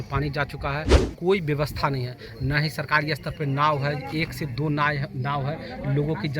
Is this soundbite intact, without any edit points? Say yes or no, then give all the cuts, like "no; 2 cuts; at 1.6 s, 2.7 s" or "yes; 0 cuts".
no; 1 cut; at 1.0 s